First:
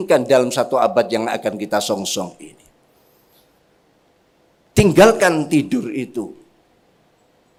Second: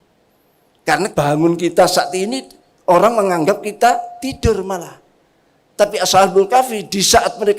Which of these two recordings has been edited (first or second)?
second